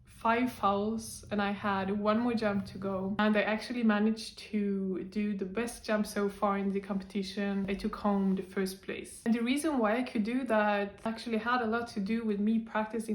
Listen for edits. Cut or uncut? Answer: cut